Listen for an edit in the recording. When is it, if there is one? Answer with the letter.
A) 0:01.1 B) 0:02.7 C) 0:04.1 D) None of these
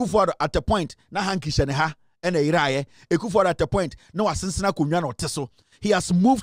D